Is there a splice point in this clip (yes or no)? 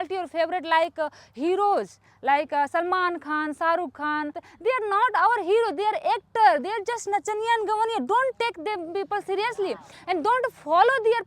yes